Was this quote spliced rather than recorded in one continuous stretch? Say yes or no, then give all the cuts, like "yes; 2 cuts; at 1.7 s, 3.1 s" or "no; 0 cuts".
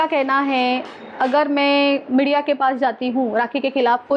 no; 0 cuts